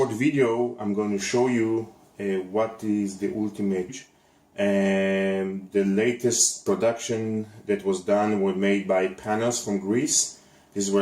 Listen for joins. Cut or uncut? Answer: uncut